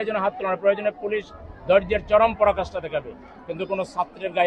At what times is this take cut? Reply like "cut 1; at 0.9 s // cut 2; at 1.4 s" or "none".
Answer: none